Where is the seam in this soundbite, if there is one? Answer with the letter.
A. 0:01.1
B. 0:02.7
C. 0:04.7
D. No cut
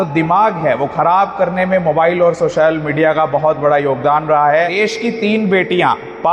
C